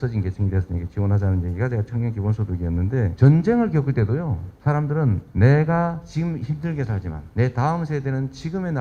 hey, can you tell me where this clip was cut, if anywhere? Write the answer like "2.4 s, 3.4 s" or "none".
3.1 s, 4.9 s, 6.0 s, 7.2 s

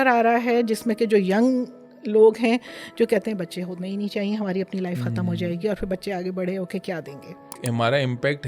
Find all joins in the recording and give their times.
7.6 s

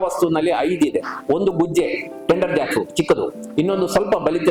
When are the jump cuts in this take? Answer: none

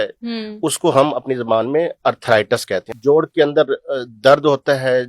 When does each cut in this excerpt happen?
2.9 s

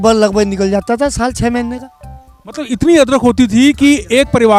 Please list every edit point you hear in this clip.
none

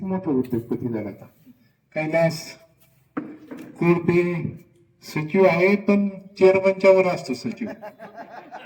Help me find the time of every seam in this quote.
none

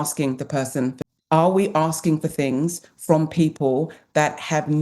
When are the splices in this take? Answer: 1.0 s

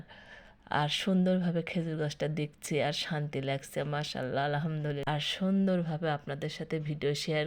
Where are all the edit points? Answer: 5.0 s

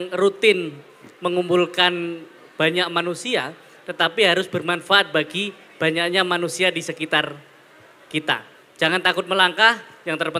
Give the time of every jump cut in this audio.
none

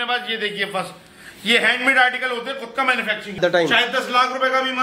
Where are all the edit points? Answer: 3.4 s

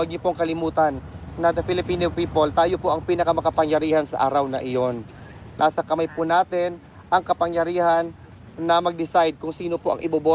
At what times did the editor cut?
none

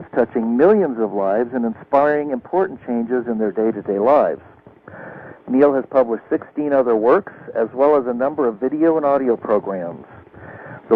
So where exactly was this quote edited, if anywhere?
none

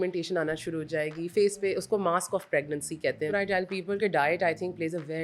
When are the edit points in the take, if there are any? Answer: 3.3 s

